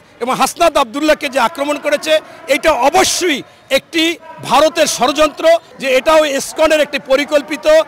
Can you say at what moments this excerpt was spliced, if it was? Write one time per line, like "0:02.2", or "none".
0:05.7